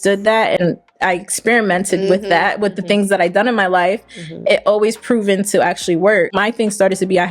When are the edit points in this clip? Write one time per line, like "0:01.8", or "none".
0:06.4